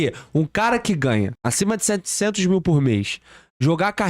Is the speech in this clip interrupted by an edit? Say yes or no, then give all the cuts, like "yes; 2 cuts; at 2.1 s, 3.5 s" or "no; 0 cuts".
yes; 1 cut; at 1.4 s